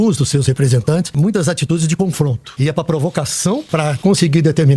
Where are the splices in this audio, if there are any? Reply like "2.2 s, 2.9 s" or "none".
1.1 s, 2.4 s, 3.7 s